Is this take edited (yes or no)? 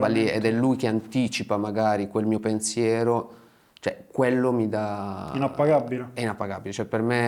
no